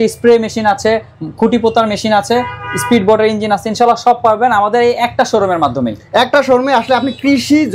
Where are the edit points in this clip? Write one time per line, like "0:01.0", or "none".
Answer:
none